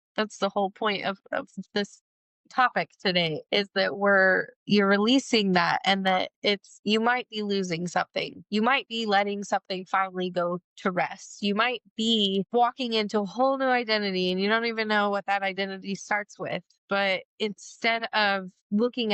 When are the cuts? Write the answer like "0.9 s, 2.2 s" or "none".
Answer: none